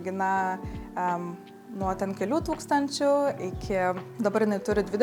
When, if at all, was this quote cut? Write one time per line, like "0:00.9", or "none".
none